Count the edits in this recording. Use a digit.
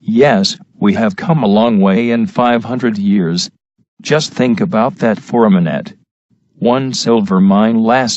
1